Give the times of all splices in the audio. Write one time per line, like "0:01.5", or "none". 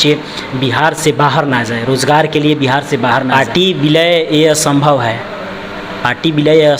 0:03.3